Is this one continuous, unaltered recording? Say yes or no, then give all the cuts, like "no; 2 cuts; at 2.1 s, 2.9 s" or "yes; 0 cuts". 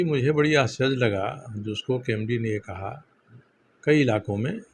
yes; 0 cuts